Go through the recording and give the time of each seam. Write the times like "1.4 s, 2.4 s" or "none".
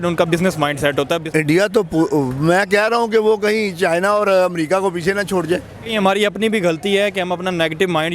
1.2 s, 5.9 s